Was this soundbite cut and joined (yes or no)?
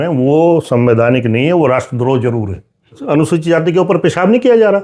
yes